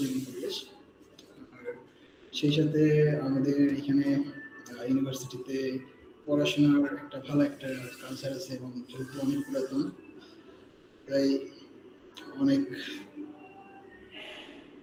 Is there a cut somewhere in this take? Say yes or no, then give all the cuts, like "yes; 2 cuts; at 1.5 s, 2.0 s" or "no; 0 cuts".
no; 0 cuts